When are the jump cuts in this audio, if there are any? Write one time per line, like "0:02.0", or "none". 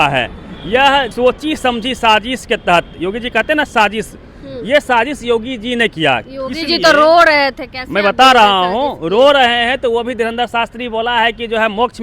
0:01.1